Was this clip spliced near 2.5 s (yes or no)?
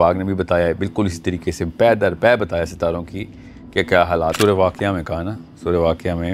no